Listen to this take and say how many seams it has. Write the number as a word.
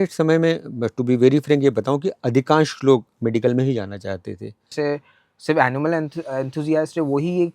one